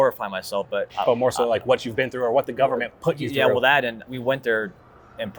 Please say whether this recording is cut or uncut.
cut